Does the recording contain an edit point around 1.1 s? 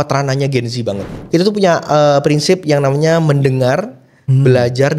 yes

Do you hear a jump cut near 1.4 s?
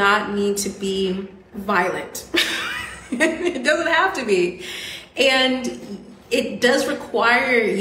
yes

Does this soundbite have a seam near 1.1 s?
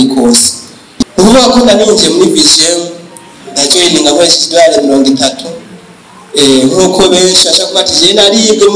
yes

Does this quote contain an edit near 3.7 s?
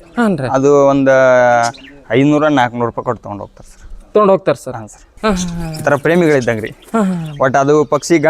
no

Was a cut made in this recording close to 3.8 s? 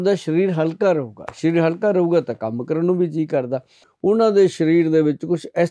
yes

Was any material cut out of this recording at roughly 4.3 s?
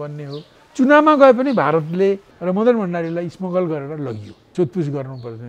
yes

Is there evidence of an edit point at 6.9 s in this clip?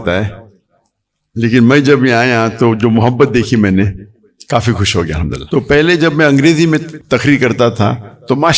yes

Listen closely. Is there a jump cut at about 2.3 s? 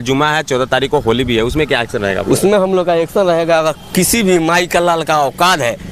no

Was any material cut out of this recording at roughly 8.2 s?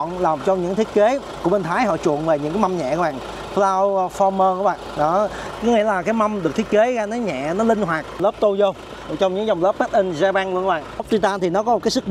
yes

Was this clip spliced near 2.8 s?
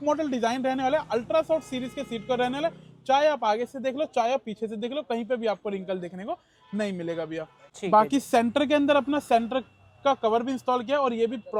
no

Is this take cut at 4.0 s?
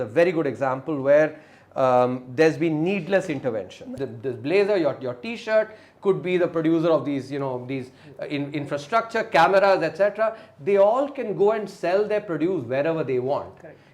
yes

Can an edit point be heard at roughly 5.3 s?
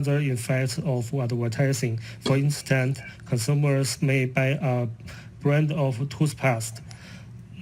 yes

